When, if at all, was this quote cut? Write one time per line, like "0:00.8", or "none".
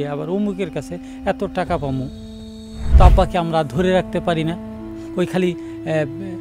0:02.9